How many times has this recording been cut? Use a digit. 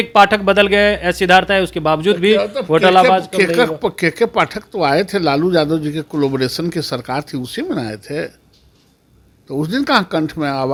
0